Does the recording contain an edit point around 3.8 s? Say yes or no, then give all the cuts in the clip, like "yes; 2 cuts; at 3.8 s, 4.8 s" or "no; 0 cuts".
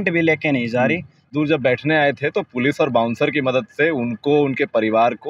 no; 1 cut; at 1.3 s